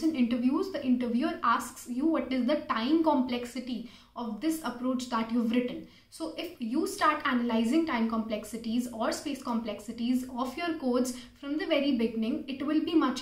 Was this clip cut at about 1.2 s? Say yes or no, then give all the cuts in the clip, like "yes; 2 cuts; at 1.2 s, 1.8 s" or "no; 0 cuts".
no; 0 cuts